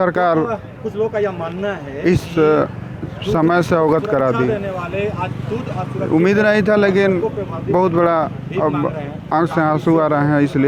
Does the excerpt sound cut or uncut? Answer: uncut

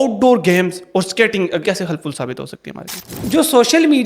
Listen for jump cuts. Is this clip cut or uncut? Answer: cut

